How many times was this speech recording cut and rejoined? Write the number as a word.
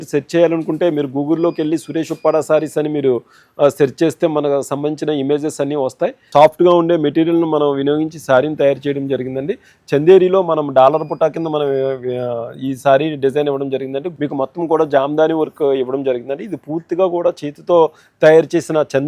two